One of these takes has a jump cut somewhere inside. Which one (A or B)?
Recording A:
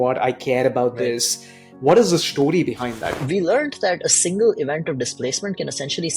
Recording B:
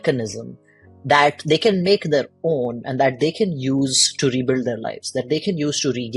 A